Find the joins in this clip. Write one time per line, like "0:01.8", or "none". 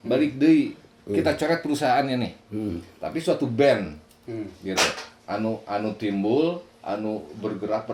none